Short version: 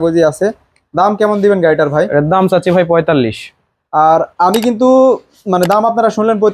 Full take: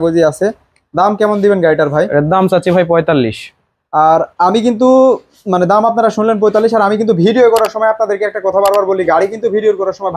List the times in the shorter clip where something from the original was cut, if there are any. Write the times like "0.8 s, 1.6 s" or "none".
none

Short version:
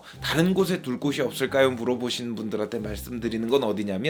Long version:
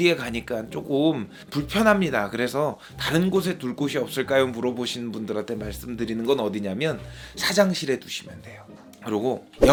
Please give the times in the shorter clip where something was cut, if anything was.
none

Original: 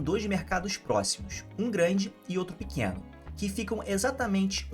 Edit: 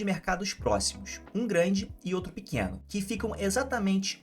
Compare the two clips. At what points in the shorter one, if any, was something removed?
2.8 s

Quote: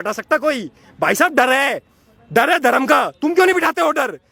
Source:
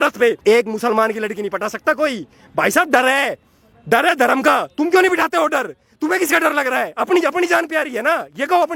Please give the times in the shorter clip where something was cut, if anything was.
none

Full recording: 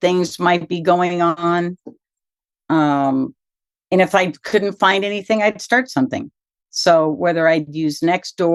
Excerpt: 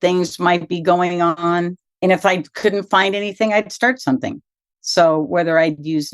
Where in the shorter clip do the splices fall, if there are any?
1.8 s

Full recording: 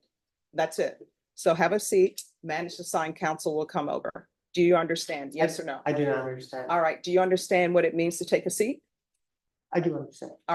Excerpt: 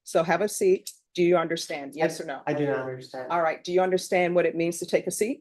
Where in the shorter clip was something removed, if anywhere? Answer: 1.0 s

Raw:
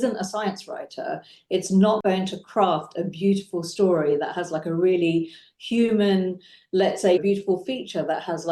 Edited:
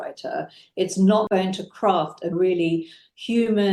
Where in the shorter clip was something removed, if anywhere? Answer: 2.3 s

